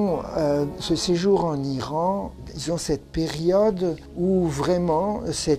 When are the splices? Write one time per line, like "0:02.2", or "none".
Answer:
none